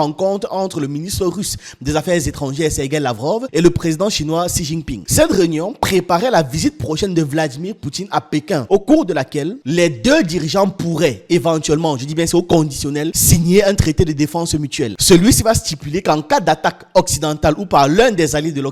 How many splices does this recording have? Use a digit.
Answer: 2